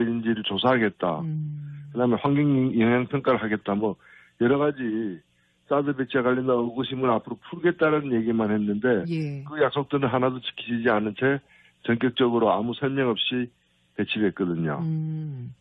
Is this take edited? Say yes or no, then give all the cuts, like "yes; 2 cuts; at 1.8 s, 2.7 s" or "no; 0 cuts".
yes; 1 cut; at 12.6 s